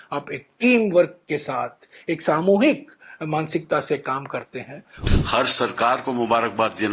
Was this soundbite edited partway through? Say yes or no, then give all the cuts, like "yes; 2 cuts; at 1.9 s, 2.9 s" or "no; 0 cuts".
yes; 1 cut; at 5.0 s